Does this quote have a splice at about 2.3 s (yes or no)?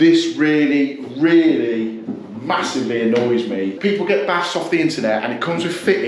no